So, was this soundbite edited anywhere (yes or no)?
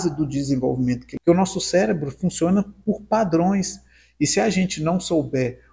yes